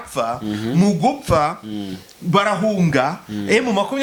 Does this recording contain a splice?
no; 0 cuts

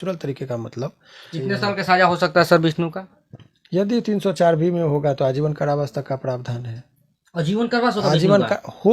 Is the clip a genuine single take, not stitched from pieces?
no; 1 cut; at 1.3 s

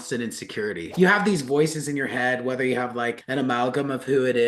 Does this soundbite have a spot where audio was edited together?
no; 0 cuts

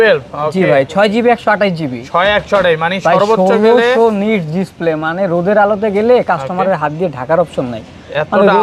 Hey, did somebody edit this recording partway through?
no; 0 cuts

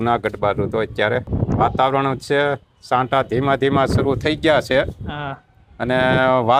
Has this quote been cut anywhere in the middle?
yes; 1 cut; at 1.3 s

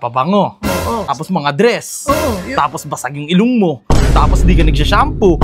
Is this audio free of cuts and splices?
no; 1 cut; at 1.2 s

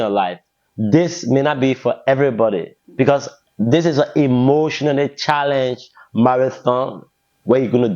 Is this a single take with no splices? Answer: yes; 0 cuts

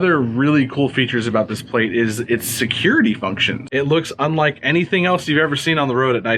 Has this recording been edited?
yes; 1 cut; at 3.5 s

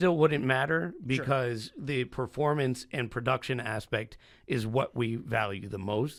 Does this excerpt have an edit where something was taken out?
no; 0 cuts

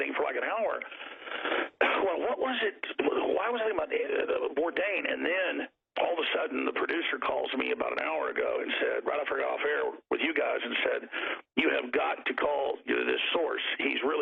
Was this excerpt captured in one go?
yes; 0 cuts

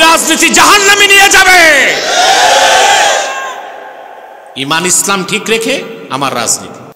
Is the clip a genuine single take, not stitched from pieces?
yes; 0 cuts

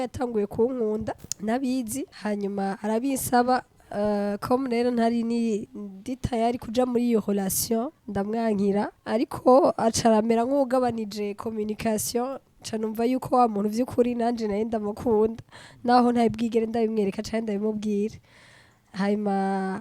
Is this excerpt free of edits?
no; 5 cuts; at 1.3 s, 2.1 s, 5.7 s, 8.0 s, 9.0 s

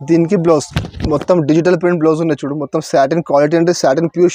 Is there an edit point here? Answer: no; 0 cuts

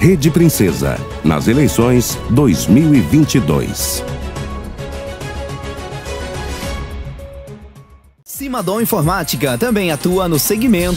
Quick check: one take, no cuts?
yes; 0 cuts

